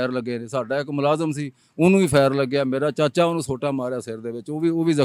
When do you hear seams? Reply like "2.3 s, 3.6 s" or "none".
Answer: none

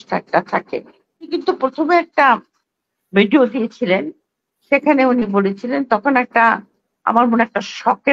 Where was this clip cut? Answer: 1.3 s

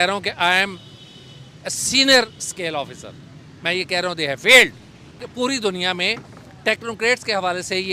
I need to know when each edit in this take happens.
5.3 s

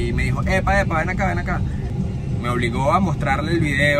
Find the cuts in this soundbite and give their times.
1.9 s

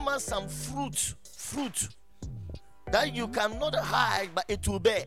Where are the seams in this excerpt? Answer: none

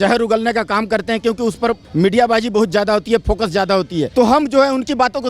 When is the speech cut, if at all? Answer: 1.8 s, 4.1 s

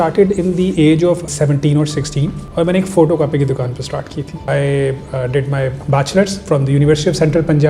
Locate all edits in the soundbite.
1.3 s, 2.4 s, 4.4 s

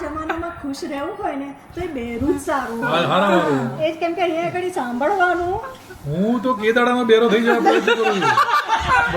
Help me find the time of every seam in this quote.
none

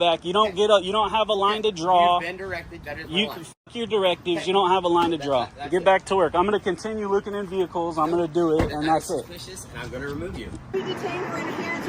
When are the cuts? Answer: 10.8 s

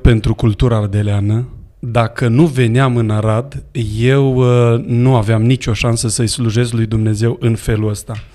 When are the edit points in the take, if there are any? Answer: none

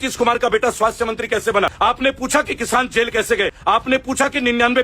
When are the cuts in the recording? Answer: 1.7 s, 3.6 s

